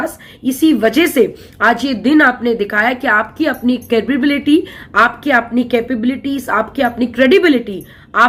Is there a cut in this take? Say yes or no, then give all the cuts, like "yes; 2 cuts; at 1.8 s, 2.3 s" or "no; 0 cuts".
no; 0 cuts